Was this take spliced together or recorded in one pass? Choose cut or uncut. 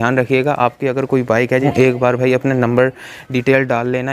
cut